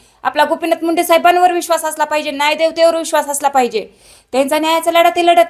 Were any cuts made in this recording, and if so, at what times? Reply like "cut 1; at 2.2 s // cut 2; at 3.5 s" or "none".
none